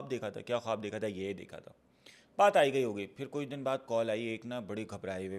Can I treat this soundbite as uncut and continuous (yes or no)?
yes